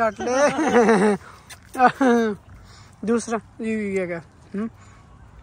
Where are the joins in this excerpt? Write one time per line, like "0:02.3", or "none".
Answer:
none